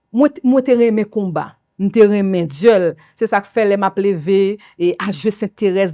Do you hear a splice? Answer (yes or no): no